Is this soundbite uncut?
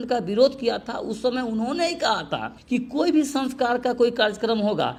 yes; 0 cuts

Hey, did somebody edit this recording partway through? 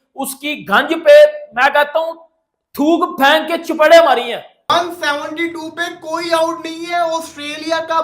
yes; 1 cut; at 4.7 s

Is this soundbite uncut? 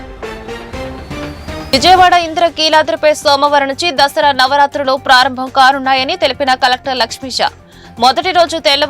yes; 0 cuts

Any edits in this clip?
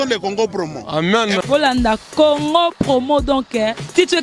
no; 0 cuts

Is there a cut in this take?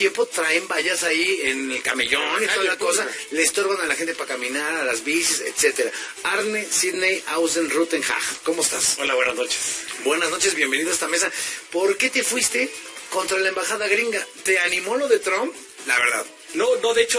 no; 0 cuts

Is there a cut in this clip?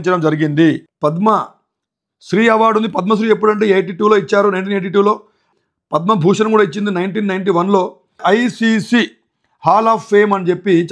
yes; 3 cuts; at 0.9 s, 5.5 s, 8.2 s

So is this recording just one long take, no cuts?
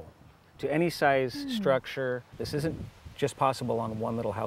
no; 1 cut; at 2.3 s

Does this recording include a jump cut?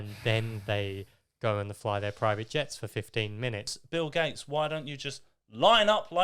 yes; 1 cut; at 3.8 s

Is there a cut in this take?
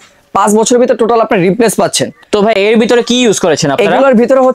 no; 0 cuts

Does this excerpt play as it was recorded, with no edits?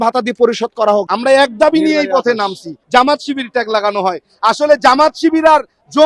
no; 2 cuts; at 1.1 s, 2.7 s

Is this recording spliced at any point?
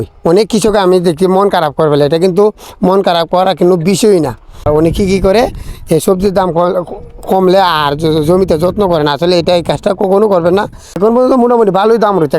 yes; 2 cuts; at 4.6 s, 11.0 s

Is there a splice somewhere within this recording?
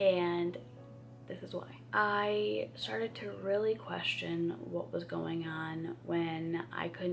no; 0 cuts

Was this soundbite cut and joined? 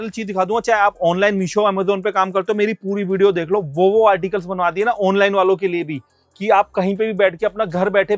no; 0 cuts

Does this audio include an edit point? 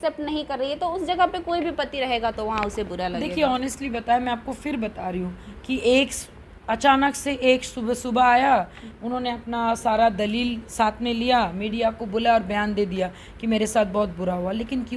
no; 0 cuts

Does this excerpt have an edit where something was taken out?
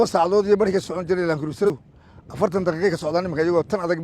yes; 1 cut; at 1.7 s

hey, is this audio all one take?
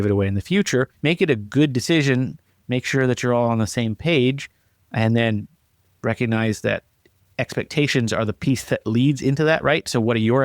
no; 1 cut; at 0.9 s

